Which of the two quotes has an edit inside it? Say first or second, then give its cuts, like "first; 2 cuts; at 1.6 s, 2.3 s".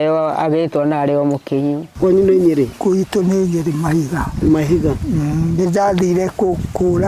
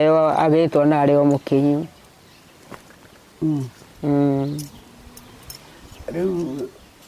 first; 1 cut; at 1.9 s